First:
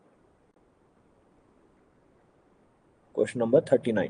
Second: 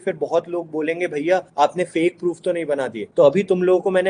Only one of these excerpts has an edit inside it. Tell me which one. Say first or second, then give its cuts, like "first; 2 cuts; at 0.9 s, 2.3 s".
second; 2 cuts; at 1.5 s, 3.0 s